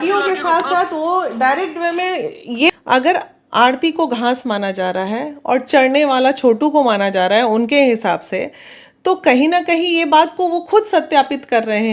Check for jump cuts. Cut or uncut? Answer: cut